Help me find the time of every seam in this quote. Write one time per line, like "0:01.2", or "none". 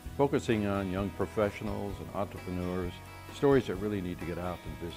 none